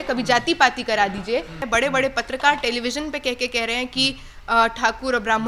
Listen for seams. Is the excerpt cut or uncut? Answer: cut